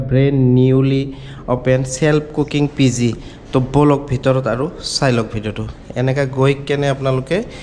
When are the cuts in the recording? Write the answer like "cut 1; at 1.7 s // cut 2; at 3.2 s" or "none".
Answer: none